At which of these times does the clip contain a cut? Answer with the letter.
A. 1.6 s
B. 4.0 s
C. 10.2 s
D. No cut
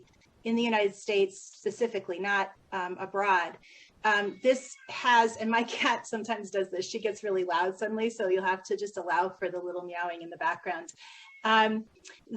C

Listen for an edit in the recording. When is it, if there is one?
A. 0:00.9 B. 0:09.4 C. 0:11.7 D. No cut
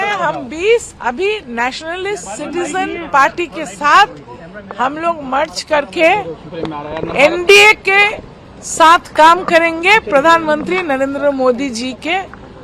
A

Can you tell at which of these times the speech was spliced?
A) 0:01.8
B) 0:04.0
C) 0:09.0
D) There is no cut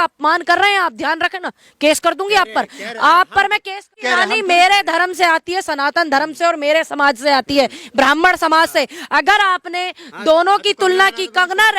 B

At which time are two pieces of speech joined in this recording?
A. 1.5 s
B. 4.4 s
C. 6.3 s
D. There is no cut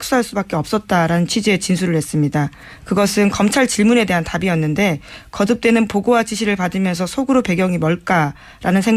B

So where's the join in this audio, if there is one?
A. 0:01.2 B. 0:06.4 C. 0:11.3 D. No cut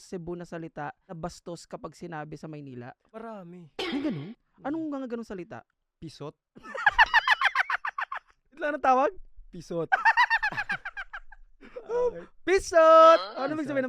A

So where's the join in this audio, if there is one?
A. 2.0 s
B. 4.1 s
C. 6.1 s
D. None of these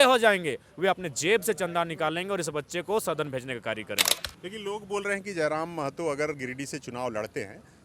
B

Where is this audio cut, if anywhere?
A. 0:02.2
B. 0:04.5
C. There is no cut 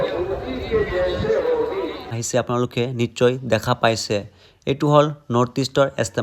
A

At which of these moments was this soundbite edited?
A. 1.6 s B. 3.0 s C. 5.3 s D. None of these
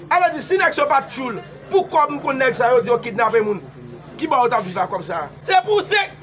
C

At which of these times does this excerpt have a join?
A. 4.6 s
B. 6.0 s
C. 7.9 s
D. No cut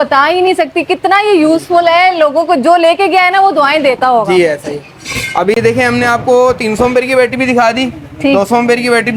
D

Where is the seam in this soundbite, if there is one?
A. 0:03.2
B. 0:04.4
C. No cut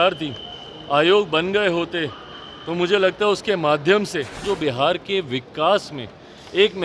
B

